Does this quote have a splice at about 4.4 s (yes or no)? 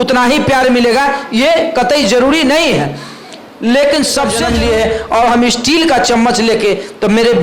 yes